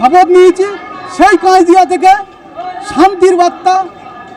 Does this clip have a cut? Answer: no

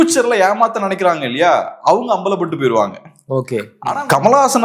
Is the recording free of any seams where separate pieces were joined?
no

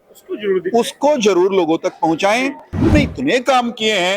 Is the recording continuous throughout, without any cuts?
no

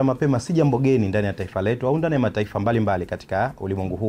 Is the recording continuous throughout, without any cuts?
yes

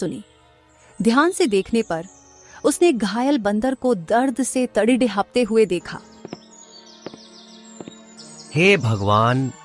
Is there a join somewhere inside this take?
yes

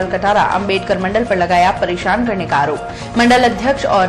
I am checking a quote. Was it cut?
no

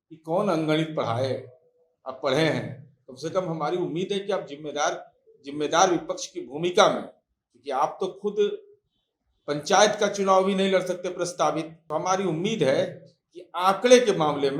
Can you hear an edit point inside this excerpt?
yes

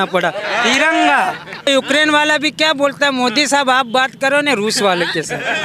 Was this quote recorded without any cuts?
no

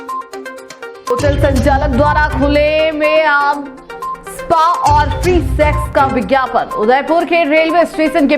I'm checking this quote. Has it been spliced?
yes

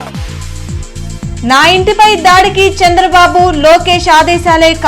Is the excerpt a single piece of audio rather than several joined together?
no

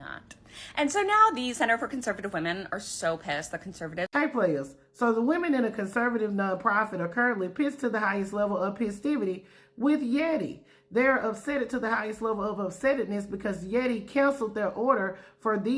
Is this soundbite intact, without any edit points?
no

